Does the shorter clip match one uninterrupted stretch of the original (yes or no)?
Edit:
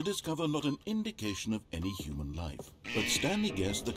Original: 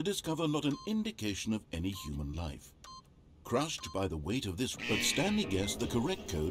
no